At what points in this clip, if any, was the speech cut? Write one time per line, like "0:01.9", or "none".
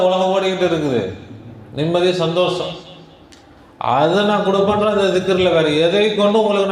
none